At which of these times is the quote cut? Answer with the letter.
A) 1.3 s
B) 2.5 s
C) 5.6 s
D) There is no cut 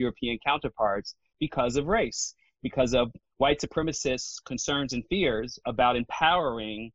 A